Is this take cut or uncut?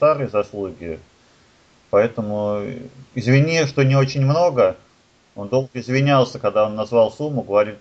uncut